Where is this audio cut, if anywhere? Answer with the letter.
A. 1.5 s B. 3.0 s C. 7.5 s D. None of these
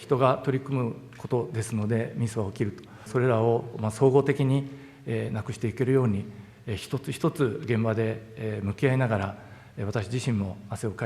B